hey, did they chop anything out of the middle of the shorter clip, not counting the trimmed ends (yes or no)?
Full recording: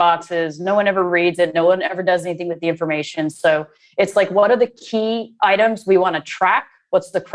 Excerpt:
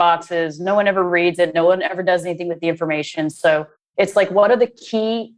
no